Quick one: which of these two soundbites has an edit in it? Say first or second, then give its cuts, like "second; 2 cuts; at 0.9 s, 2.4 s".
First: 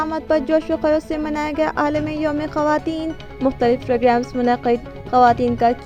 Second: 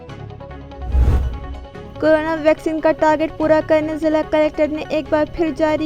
second; 1 cut; at 1.1 s